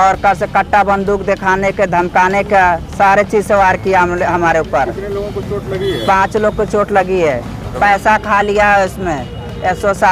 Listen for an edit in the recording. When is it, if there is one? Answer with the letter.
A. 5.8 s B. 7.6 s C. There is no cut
B